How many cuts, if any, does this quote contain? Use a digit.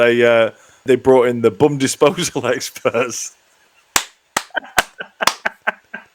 0